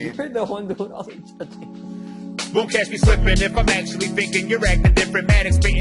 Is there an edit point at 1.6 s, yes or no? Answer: yes